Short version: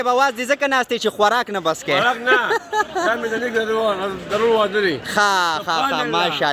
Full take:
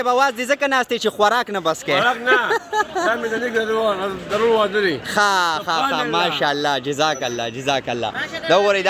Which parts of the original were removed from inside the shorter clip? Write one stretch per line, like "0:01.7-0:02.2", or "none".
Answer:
none